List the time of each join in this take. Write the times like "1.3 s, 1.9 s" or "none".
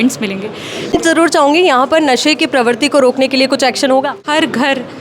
1.0 s, 4.2 s

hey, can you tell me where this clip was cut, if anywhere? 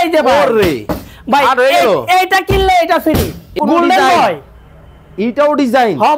3.5 s

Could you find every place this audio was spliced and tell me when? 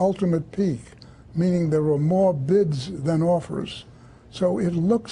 3.6 s

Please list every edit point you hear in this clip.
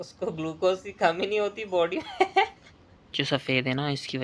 3.2 s

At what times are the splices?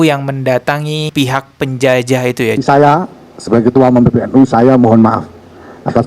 2.6 s

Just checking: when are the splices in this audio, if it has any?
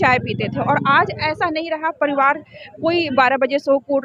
none

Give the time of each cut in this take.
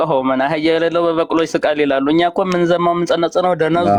none

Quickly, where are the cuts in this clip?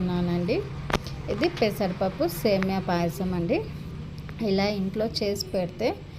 none

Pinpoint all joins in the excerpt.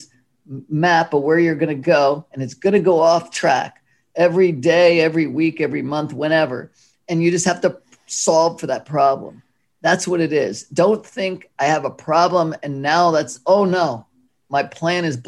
none

